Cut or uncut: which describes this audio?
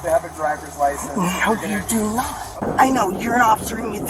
cut